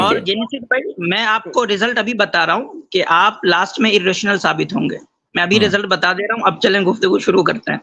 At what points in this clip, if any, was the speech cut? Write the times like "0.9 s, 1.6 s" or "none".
none